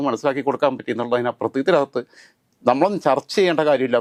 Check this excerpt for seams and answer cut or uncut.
uncut